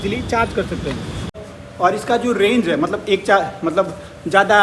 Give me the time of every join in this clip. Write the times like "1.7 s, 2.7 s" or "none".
1.3 s